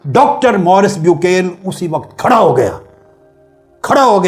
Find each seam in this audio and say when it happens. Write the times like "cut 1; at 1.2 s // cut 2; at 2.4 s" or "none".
none